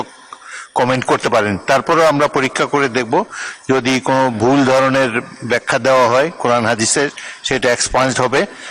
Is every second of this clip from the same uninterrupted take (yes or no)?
yes